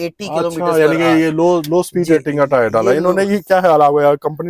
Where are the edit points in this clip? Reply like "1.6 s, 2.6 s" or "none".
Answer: none